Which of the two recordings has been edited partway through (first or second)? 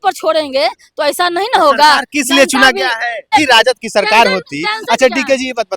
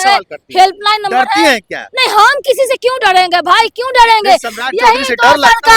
first